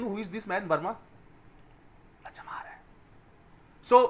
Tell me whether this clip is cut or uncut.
uncut